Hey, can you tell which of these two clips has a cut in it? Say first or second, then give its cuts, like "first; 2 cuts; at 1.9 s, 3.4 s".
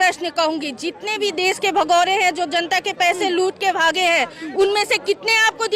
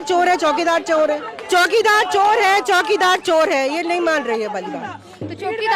second; 1 cut; at 1.3 s